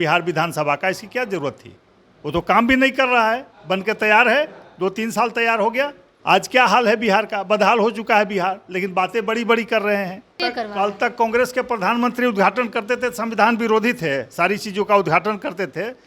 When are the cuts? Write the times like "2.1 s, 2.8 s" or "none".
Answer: 6.1 s, 10.4 s